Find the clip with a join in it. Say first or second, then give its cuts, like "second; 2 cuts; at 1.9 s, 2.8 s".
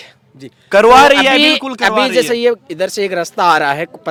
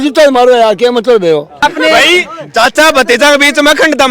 second; 1 cut; at 1.6 s